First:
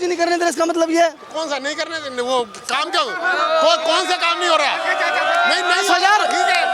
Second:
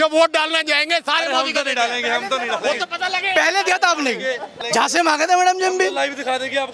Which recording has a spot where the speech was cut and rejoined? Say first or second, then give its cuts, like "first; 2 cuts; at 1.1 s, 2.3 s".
second; 1 cut; at 4.6 s